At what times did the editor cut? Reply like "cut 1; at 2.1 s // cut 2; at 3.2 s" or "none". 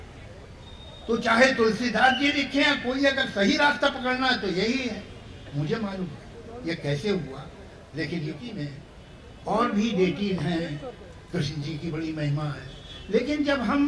cut 1; at 8.5 s